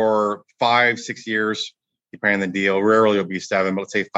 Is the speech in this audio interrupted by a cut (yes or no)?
no